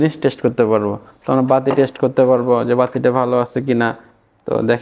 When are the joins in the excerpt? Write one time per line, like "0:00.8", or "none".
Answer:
none